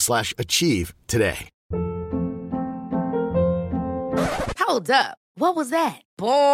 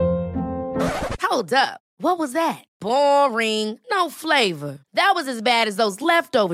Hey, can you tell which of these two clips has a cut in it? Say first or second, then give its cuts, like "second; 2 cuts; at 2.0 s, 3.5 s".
first; 1 cut; at 1.5 s